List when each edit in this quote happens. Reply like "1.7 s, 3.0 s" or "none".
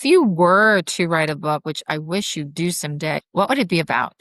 3.2 s